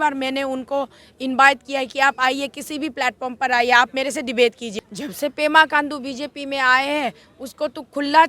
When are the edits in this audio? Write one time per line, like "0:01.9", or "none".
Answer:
0:04.6